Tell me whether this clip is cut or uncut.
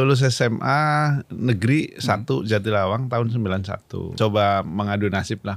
cut